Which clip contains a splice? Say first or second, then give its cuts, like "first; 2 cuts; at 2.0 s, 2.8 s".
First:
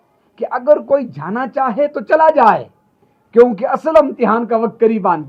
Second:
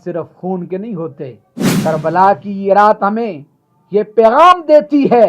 second; 1 cut; at 1.8 s